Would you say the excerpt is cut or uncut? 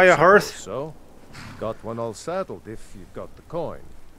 uncut